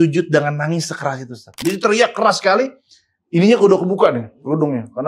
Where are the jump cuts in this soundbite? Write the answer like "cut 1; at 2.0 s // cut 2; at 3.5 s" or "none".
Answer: cut 1; at 1.5 s